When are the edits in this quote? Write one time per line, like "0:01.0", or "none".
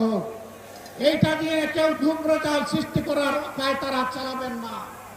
none